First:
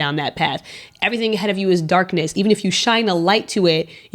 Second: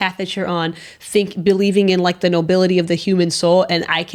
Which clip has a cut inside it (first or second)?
first